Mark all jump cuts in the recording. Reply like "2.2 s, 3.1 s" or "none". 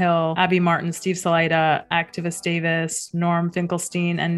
none